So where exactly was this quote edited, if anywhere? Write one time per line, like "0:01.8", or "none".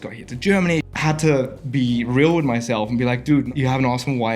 0:00.9
0:03.5